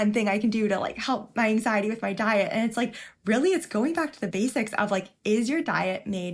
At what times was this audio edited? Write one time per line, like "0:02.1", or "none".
0:04.2